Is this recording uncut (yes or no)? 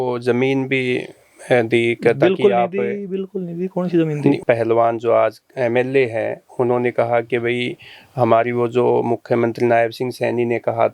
no